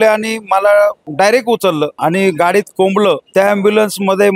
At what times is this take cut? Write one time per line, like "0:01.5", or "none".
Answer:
0:01.0
0:01.9
0:03.2